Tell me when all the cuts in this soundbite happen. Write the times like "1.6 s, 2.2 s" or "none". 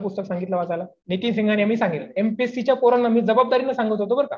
0.9 s